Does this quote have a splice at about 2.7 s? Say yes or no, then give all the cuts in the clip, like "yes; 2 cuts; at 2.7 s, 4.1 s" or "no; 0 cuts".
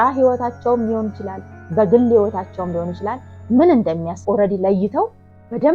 no; 1 cut; at 4.2 s